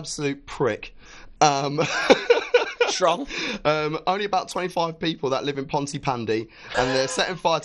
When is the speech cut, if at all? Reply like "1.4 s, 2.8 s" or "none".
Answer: none